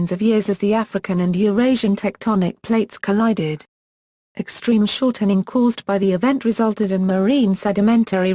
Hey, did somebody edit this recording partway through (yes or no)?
no